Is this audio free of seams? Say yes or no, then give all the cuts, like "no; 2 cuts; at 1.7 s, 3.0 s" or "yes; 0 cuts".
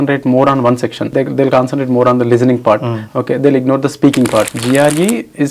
no; 2 cuts; at 1.0 s, 4.5 s